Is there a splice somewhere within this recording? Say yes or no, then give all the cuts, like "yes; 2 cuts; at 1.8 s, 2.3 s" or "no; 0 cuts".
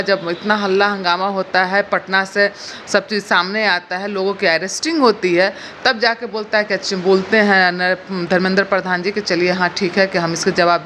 no; 0 cuts